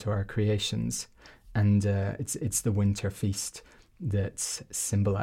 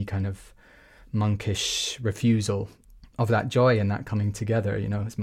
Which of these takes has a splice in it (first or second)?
second